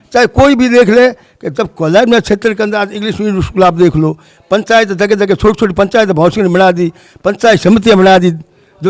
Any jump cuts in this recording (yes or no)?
no